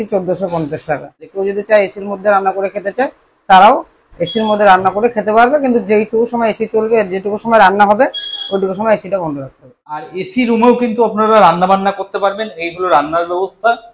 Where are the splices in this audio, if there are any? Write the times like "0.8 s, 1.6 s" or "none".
1.2 s, 10.2 s